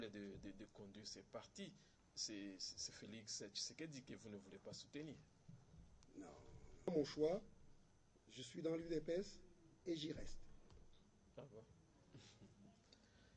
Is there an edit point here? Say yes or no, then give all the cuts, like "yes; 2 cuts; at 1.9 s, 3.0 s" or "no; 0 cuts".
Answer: yes; 1 cut; at 6.9 s